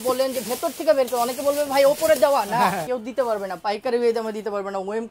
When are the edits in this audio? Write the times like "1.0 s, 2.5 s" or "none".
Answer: 2.9 s